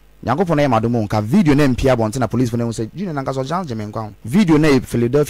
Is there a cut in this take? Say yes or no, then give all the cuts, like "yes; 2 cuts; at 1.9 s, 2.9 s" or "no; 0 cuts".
yes; 1 cut; at 4.2 s